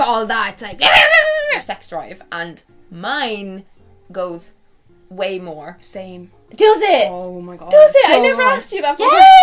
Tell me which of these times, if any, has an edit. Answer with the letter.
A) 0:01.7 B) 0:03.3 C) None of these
A